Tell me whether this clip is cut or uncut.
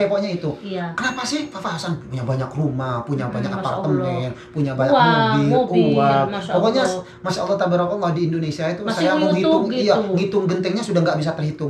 uncut